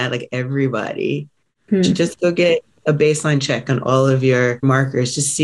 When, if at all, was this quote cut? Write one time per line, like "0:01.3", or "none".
0:01.6
0:04.6